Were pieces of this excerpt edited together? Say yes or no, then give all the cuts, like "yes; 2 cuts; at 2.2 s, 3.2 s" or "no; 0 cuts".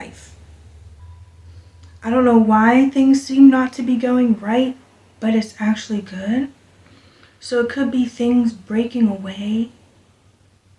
yes; 1 cut; at 1.0 s